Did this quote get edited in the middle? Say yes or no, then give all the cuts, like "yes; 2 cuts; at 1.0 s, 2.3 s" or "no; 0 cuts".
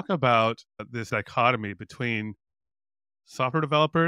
yes; 1 cut; at 1.1 s